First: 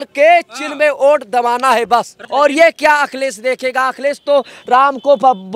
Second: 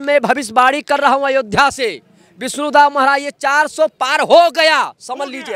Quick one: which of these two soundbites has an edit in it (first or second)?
first